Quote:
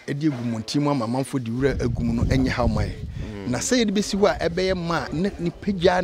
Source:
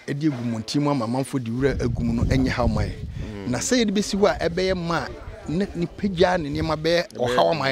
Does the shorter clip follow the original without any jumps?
no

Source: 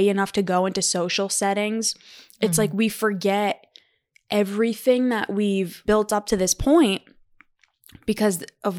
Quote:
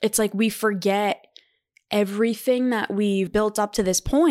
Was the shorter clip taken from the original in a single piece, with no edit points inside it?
no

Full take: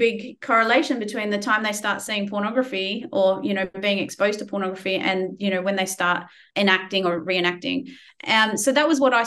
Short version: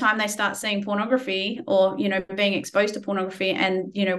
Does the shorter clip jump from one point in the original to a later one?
no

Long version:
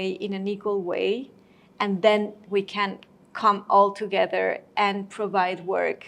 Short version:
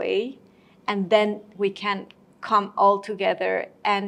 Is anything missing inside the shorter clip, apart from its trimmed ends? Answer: no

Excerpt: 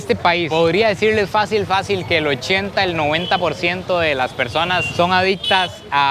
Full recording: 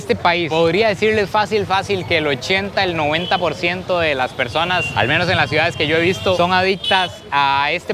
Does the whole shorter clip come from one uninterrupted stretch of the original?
no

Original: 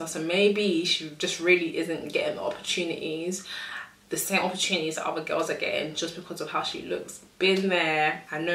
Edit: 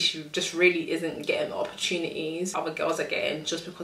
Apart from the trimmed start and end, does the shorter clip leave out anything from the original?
yes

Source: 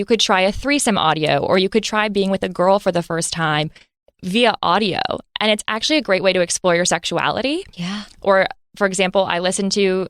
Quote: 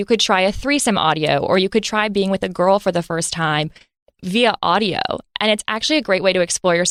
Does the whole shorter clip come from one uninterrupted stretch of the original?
yes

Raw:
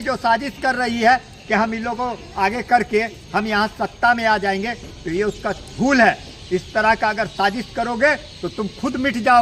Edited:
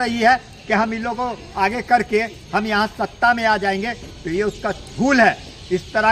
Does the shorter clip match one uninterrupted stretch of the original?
yes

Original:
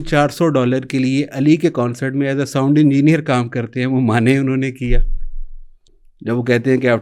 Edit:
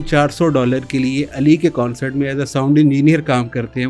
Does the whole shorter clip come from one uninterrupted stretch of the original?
yes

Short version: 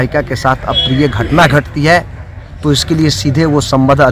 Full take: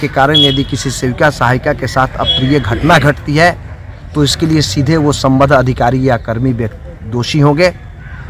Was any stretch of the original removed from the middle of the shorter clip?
no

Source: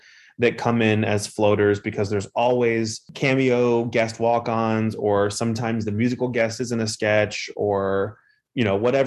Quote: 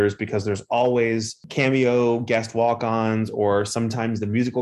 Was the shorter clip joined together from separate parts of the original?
no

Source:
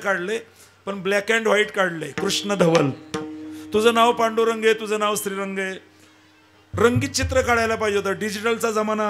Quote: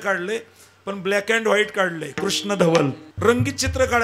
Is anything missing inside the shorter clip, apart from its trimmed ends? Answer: yes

